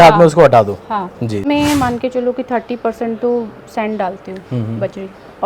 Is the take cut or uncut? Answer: cut